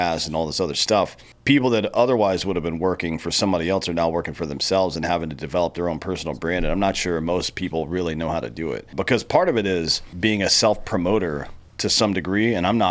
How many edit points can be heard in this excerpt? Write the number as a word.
three